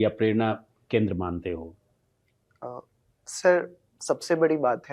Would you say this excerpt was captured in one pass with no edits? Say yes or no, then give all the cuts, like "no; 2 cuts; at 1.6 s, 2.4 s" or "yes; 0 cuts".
yes; 0 cuts